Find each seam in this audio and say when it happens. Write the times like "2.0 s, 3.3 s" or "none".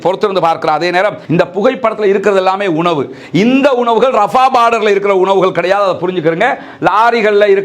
1.2 s